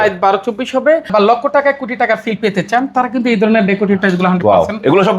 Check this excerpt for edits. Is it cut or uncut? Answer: cut